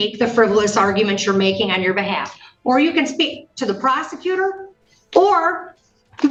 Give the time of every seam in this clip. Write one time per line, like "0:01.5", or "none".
none